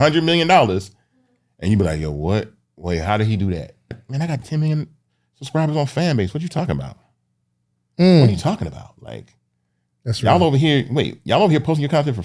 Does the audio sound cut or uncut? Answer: cut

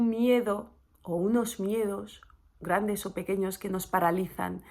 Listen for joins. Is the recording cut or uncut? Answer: uncut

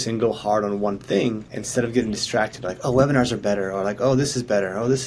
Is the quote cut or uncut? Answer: cut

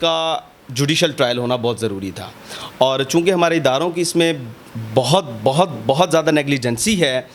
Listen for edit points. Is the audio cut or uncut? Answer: uncut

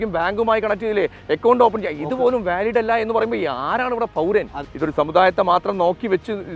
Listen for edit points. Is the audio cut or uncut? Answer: cut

